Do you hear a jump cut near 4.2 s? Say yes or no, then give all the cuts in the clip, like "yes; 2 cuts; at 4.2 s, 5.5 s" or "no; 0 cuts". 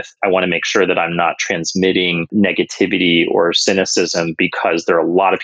no; 1 cut; at 2.2 s